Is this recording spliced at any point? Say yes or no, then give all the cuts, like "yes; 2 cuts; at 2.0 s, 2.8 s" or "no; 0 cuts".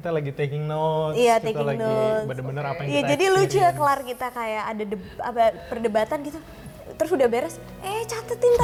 no; 0 cuts